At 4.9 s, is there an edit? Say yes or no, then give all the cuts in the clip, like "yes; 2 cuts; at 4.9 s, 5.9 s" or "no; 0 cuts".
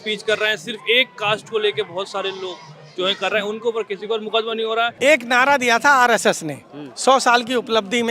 yes; 1 cut; at 4.9 s